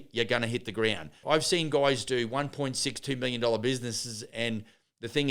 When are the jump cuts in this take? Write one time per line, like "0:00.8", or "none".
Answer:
0:01.2